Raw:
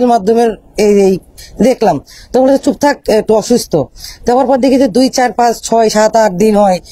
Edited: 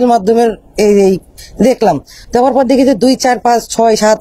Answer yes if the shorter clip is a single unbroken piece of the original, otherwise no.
no